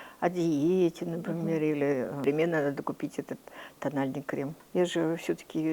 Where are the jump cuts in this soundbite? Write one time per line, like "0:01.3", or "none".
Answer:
0:02.2
0:04.6